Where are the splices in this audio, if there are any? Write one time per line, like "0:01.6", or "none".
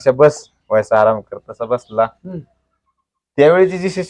none